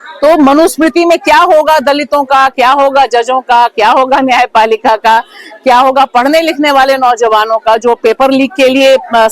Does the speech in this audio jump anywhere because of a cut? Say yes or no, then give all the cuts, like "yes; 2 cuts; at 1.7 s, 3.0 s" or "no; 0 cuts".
no; 0 cuts